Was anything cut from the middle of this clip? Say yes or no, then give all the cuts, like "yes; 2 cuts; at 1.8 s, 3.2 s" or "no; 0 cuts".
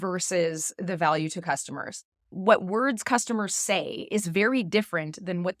yes; 1 cut; at 2.3 s